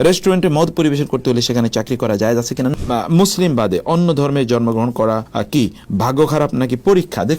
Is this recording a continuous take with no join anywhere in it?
no; 1 cut; at 2.7 s

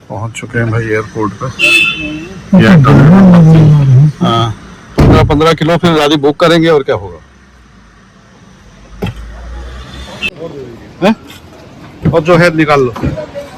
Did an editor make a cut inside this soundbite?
no; 0 cuts

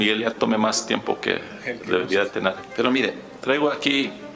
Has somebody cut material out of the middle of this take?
yes; 1 cut; at 2.6 s

